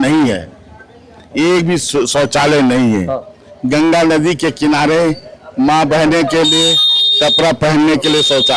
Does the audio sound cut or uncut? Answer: uncut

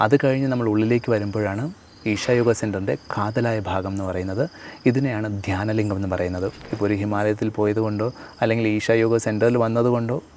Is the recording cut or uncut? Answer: cut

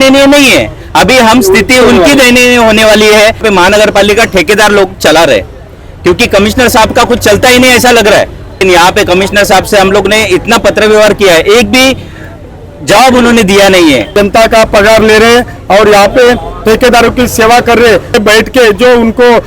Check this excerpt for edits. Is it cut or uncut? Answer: cut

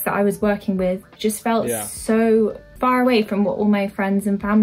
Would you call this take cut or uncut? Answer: cut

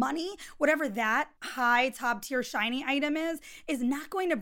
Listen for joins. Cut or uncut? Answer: cut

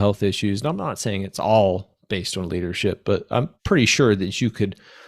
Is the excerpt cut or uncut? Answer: cut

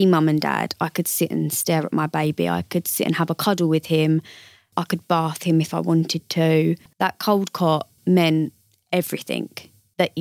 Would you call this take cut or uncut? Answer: cut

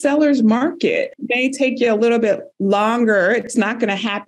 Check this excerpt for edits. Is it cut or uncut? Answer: cut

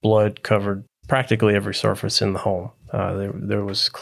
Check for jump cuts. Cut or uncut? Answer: cut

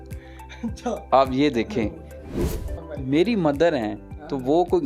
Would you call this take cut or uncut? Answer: cut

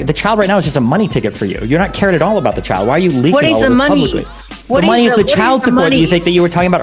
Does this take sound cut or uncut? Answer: uncut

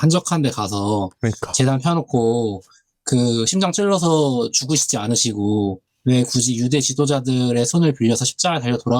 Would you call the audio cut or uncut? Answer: cut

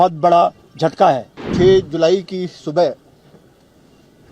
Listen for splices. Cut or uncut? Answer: cut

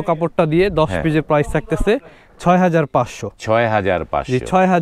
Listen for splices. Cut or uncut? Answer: uncut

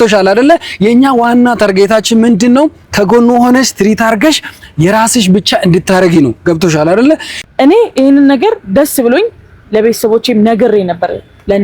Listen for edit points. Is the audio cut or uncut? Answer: cut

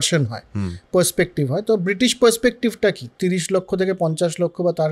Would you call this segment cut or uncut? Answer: cut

